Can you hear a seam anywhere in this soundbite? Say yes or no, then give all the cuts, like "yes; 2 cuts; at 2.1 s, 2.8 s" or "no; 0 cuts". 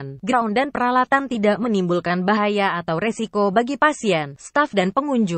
no; 0 cuts